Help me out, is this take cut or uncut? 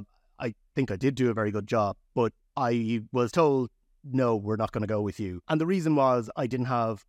cut